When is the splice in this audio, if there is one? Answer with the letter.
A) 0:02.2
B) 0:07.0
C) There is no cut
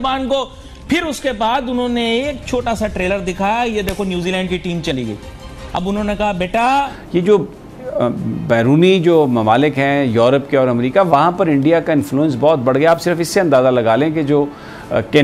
B